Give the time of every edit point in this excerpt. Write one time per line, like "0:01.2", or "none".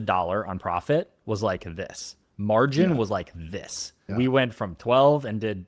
0:04.1